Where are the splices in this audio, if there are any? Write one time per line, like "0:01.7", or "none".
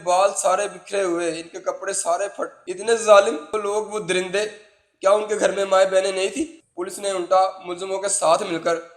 0:02.6
0:06.6